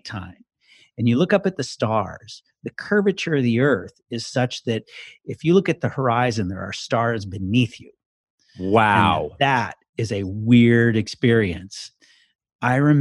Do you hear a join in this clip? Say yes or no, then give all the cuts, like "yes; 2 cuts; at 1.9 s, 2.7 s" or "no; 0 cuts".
yes; 1 cut; at 12.0 s